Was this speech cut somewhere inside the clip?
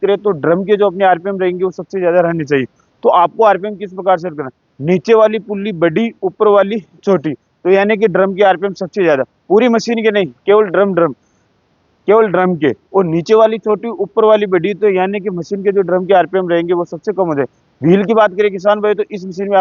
no; 0 cuts

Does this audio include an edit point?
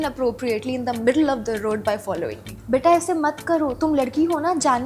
yes; 1 cut; at 2.5 s

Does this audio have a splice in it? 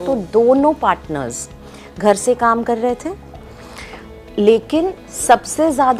no; 0 cuts

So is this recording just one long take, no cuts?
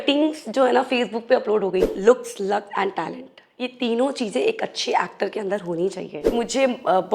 no; 2 cuts; at 1.9 s, 6.2 s

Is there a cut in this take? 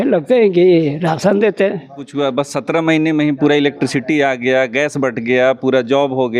yes; 1 cut; at 2.1 s

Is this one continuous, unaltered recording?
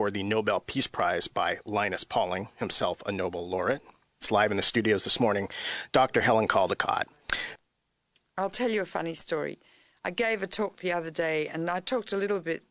no; 1 cut; at 3.0 s

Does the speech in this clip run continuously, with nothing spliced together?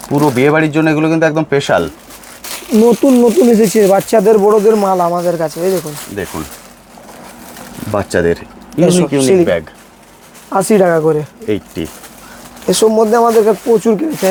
yes; 0 cuts

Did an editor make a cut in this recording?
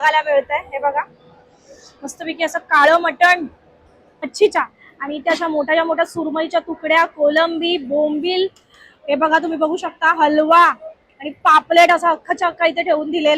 yes; 1 cut; at 4.3 s

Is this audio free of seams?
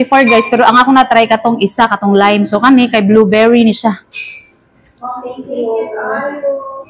yes; 0 cuts

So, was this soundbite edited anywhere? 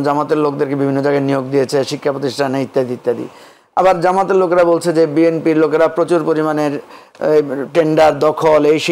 no; 0 cuts

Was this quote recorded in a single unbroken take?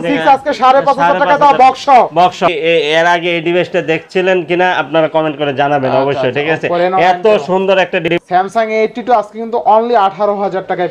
no; 2 cuts; at 2.4 s, 8.0 s

